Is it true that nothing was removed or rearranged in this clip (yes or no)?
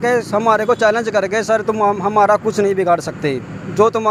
yes